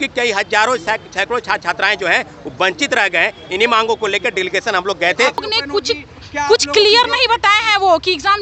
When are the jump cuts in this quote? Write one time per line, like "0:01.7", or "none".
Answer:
0:05.4